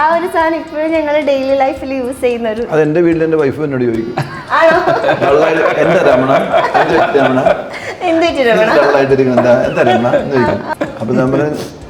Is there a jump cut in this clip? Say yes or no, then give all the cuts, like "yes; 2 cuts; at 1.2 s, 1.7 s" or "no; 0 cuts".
yes; 1 cut; at 10.7 s